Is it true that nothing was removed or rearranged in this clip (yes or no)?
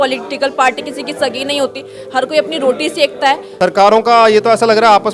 no